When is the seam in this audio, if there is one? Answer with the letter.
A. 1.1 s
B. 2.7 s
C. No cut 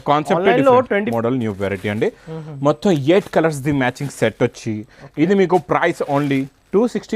A